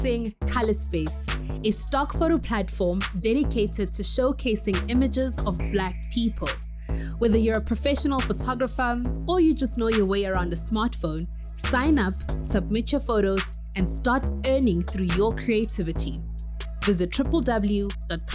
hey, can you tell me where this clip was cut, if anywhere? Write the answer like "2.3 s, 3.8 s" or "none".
none